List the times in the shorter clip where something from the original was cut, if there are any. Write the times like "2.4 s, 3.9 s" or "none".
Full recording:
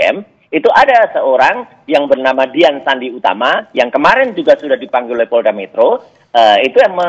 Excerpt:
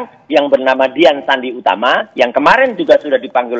none